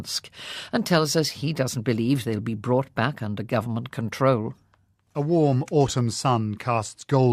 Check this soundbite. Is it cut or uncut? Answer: uncut